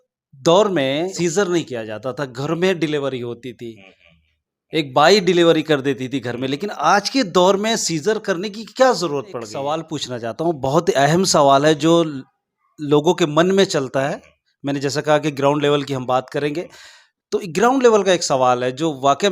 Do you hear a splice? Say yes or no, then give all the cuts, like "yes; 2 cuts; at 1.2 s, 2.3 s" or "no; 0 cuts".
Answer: yes; 2 cuts; at 1.1 s, 9.5 s